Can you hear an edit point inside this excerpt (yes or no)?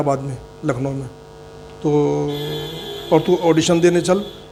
no